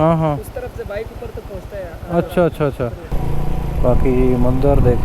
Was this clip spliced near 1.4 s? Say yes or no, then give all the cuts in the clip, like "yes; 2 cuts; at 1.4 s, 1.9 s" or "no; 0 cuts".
no; 1 cut; at 3.1 s